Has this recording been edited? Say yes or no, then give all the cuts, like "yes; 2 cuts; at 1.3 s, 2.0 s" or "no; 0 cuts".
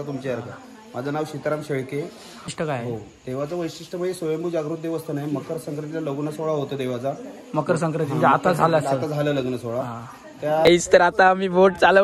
yes; 2 cuts; at 2.5 s, 10.6 s